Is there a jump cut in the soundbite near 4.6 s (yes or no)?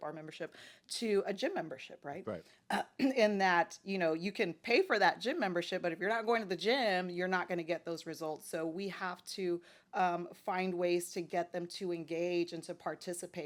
no